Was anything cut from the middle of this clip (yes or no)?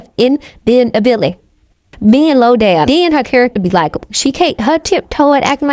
yes